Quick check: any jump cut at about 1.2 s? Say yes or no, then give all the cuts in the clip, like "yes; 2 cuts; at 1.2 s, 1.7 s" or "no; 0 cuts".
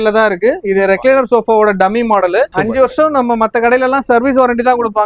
no; 1 cut; at 2.5 s